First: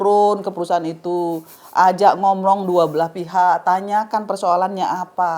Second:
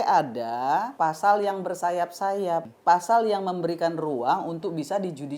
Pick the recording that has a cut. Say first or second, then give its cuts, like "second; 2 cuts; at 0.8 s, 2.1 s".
second; 2 cuts; at 0.9 s, 2.7 s